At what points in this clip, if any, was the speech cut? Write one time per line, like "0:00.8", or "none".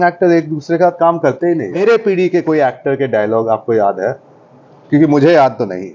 0:01.8

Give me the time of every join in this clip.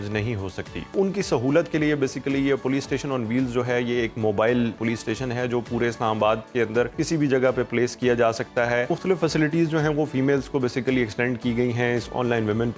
0:00.9
0:04.8
0:06.9
0:08.9

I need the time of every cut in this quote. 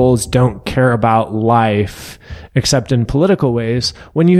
none

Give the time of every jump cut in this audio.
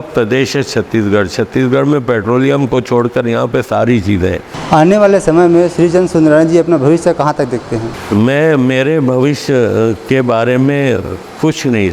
0:04.5
0:07.9

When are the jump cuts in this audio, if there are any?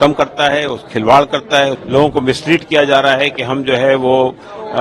0:01.8

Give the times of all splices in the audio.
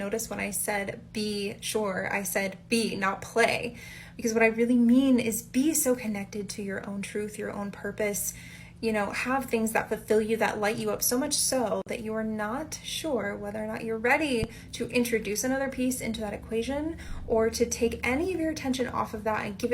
0:10.5

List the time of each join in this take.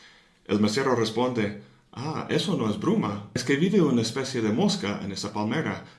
0:04.3

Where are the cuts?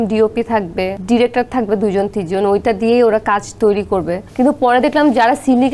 0:00.9
0:04.2

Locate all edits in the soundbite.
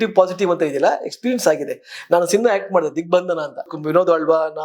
0:03.7

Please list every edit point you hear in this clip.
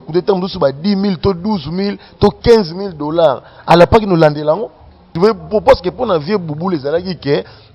0:05.0

